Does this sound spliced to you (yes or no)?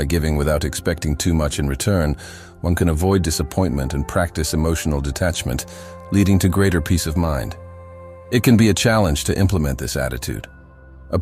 yes